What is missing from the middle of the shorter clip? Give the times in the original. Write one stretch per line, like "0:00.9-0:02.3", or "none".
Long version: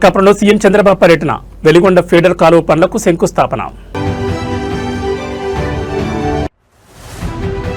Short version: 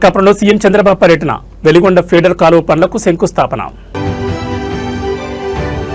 none